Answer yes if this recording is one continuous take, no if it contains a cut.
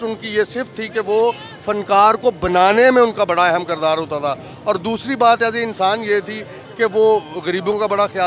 yes